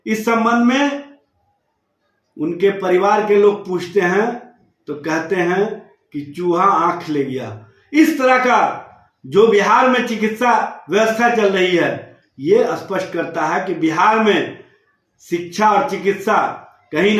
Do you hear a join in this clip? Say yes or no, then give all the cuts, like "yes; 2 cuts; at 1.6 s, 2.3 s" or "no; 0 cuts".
no; 0 cuts